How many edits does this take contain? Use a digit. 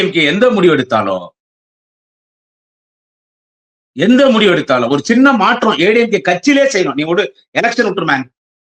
0